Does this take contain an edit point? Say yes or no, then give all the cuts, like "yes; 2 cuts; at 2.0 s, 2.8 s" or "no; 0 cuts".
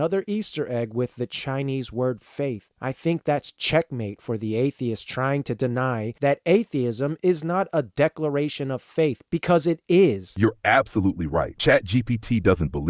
yes; 2 cuts; at 10.3 s, 11.5 s